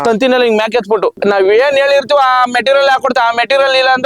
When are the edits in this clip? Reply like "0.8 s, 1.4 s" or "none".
1.2 s